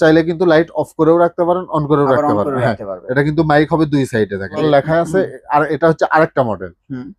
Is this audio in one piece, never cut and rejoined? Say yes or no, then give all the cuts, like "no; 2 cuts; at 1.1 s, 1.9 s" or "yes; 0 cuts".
no; 1 cut; at 4.6 s